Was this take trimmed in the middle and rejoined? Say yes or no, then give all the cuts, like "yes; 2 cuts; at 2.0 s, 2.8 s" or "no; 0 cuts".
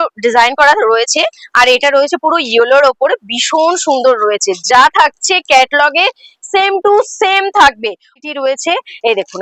yes; 1 cut; at 8.1 s